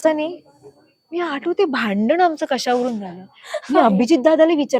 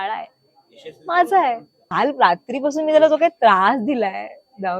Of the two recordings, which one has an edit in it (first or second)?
second